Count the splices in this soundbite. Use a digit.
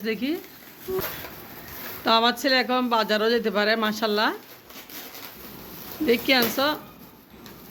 0